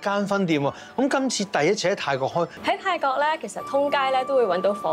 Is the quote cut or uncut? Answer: cut